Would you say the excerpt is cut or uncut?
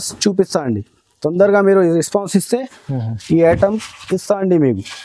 uncut